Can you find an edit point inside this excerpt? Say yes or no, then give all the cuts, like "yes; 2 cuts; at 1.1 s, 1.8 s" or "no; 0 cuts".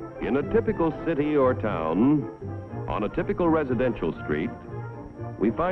yes; 1 cut; at 3.8 s